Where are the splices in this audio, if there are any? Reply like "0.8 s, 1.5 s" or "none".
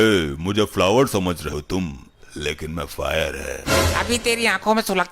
1.5 s

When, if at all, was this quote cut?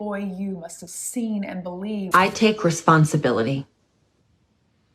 2.1 s

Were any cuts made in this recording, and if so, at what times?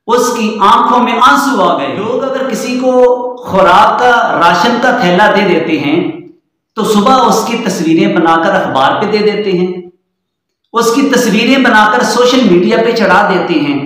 2.1 s

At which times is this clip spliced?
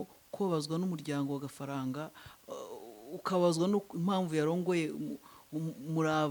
none

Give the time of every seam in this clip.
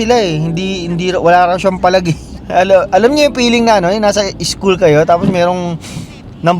2.3 s

